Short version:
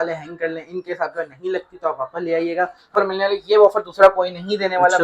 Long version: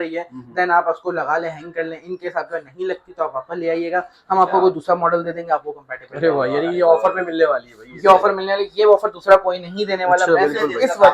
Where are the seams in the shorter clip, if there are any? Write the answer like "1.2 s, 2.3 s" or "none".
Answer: 2.9 s